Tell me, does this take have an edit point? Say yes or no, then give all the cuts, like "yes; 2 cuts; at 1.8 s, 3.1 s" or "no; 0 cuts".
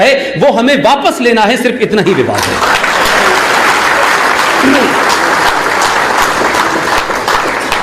no; 0 cuts